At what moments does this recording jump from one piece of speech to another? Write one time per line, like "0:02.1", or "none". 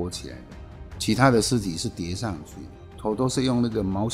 0:02.9